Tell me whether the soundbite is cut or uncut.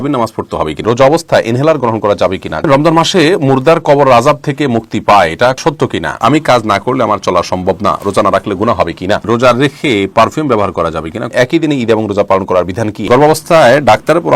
cut